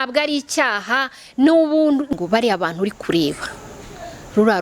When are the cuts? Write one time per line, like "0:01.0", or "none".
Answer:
0:02.1

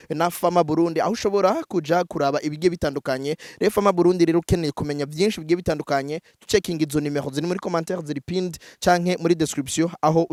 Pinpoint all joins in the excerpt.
none

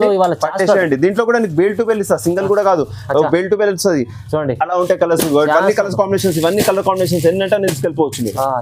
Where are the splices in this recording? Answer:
none

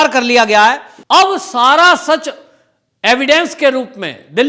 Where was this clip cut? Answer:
0:00.9

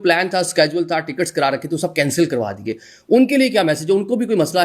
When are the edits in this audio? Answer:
none

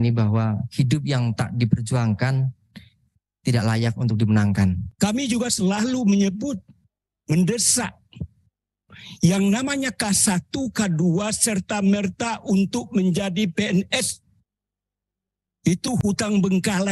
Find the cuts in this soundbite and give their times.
0:04.9

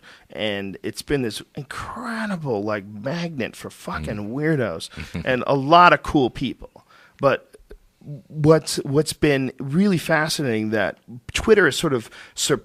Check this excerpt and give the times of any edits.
none

